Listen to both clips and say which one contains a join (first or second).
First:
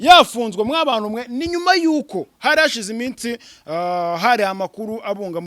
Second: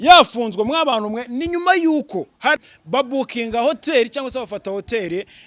second